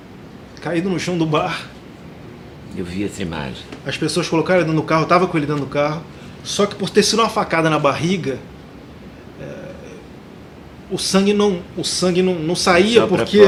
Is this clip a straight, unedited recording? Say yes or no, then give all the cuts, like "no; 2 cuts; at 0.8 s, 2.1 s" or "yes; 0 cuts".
yes; 0 cuts